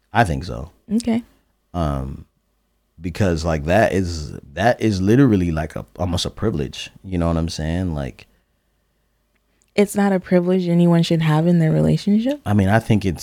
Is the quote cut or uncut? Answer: uncut